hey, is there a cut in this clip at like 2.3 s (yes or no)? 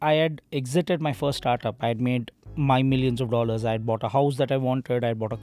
no